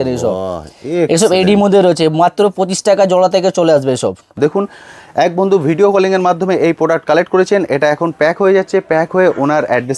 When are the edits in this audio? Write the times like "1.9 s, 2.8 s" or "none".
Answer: 4.3 s